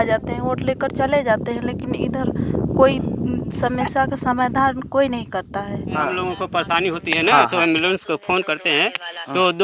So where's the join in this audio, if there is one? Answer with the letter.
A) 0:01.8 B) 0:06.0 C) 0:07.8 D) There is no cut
B